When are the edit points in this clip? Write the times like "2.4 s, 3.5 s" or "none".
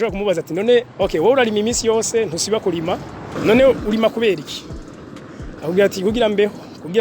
0.9 s, 3.3 s